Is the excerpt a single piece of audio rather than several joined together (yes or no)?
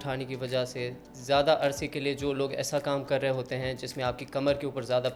yes